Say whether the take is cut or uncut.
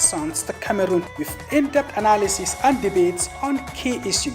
cut